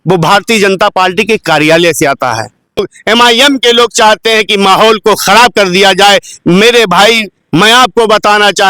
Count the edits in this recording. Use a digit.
1